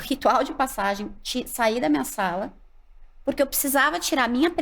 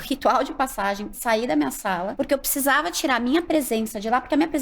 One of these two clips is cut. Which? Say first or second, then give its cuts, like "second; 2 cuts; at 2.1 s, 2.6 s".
second; 2 cuts; at 1.1 s, 2.1 s